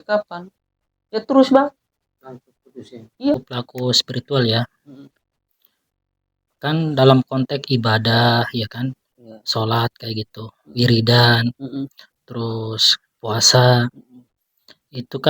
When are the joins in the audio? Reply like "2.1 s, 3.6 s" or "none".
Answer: 3.3 s